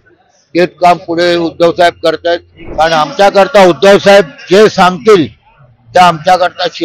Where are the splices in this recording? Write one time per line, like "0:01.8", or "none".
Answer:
0:02.6

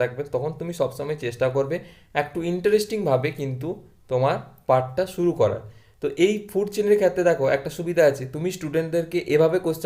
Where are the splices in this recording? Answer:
none

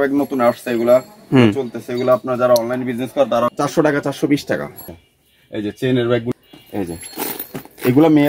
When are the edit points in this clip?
0:03.6
0:05.0
0:06.3

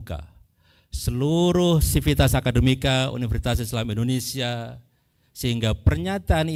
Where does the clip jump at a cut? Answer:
none

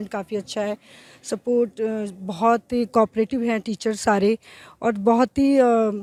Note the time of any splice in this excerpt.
none

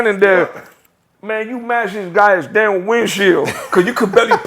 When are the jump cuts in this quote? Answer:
0:03.6

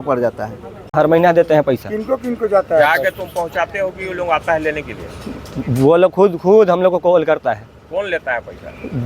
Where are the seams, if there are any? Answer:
0:00.9

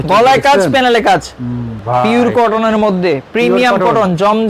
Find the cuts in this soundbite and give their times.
0:01.8

